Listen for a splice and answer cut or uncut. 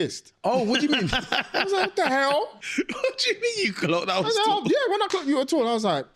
cut